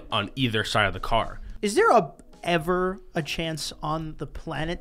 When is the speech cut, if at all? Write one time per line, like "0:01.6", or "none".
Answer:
0:01.4

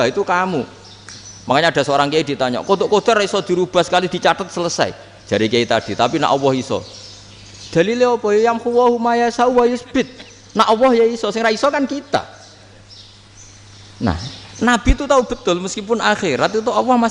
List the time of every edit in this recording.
none

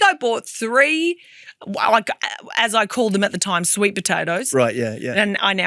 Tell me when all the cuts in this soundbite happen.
none

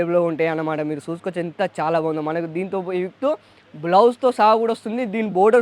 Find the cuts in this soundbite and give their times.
none

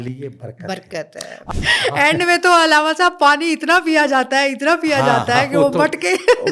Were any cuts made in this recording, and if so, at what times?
0:01.6

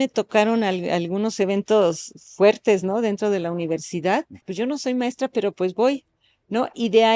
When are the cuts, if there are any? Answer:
0:04.4

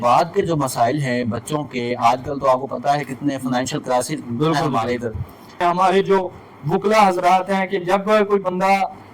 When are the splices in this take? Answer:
0:05.6

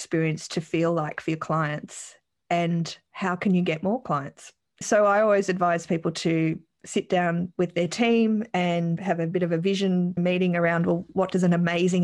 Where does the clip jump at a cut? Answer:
0:04.8
0:09.0
0:10.2
0:11.1

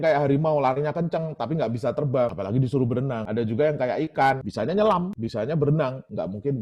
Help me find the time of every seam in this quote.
0:04.5
0:05.2

